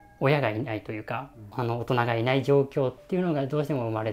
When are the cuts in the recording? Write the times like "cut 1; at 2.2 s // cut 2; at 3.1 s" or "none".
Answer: cut 1; at 1.4 s